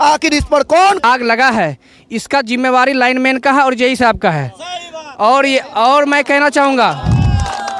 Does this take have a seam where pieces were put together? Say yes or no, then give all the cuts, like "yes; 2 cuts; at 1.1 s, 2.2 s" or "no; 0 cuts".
yes; 1 cut; at 1.0 s